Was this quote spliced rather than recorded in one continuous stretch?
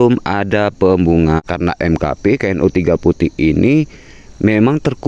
yes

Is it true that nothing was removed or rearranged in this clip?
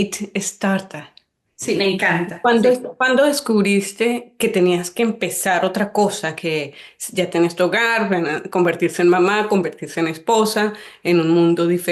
yes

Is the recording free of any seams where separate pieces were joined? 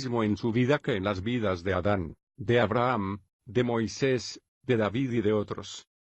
no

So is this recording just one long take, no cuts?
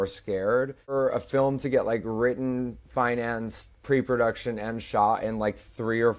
no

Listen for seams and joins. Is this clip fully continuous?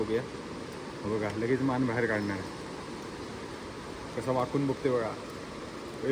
yes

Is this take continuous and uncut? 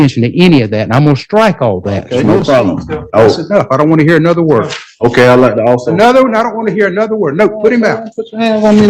no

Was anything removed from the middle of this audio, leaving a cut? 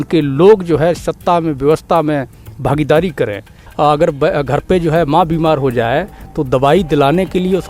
yes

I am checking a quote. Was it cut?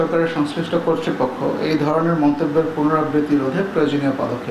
no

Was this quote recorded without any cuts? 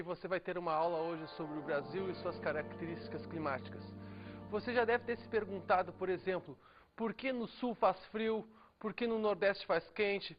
no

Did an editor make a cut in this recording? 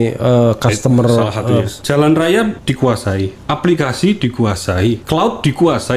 yes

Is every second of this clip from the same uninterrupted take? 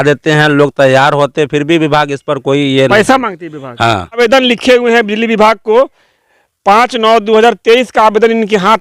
no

